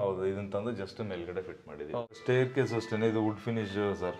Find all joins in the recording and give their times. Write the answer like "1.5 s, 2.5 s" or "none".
2.0 s

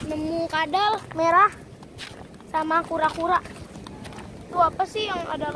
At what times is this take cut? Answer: 4.4 s

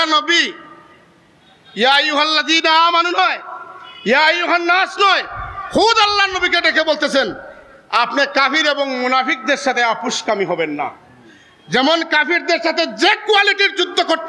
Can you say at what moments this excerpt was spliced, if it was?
none

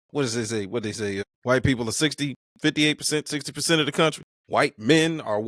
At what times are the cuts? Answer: 1.2 s, 2.4 s, 4.3 s

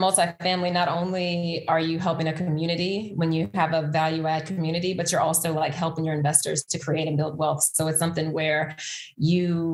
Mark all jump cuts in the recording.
none

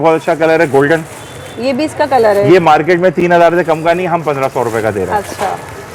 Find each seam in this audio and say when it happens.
none

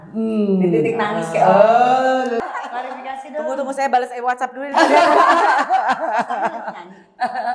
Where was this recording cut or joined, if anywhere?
2.4 s

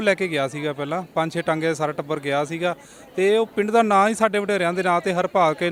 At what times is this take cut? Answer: none

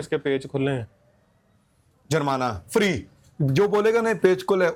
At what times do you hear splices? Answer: none

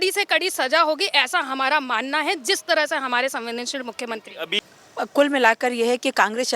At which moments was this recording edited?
4.6 s

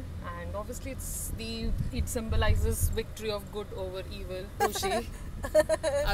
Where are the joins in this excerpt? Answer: 4.6 s

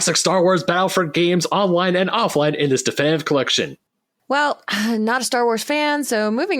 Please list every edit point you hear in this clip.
3.8 s

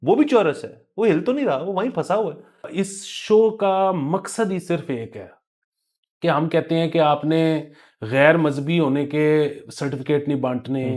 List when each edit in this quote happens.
2.7 s

